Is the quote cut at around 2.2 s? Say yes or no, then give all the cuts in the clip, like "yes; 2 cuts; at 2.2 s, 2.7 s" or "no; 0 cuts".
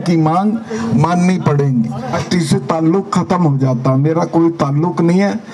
yes; 1 cut; at 2.2 s